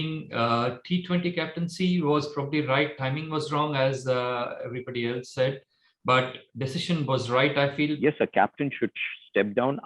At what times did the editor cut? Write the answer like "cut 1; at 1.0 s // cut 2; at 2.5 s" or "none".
cut 1; at 8.0 s

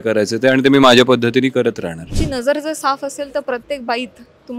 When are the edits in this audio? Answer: cut 1; at 2.1 s

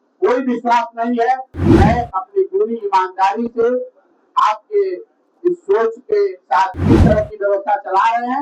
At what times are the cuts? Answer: cut 1; at 1.5 s // cut 2; at 6.7 s

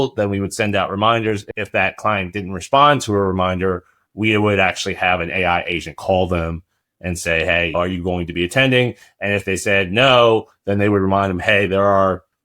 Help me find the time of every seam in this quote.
cut 1; at 1.5 s // cut 2; at 7.7 s

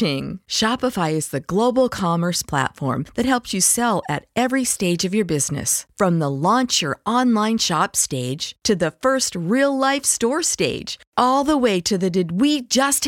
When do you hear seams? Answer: none

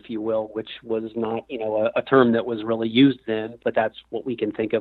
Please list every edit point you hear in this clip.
cut 1; at 3.6 s

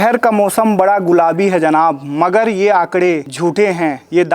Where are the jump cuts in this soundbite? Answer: cut 1; at 3.3 s

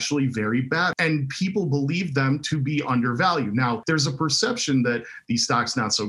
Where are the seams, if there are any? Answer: cut 1; at 0.9 s // cut 2; at 3.8 s

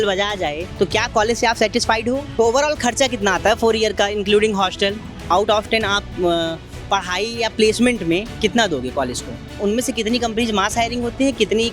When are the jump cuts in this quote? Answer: cut 1; at 2.3 s // cut 2; at 5.3 s // cut 3; at 9.6 s

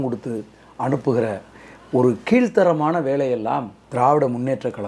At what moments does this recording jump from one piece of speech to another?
cut 1; at 3.8 s

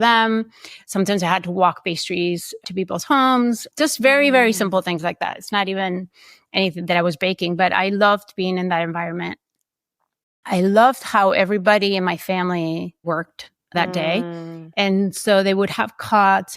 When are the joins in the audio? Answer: cut 1; at 13.0 s

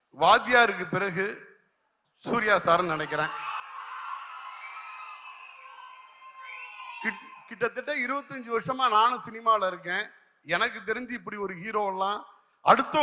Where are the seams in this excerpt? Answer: none

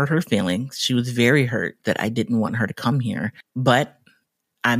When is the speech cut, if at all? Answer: cut 1; at 3.4 s

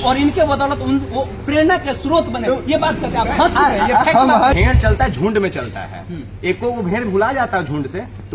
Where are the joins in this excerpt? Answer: cut 1; at 4.6 s

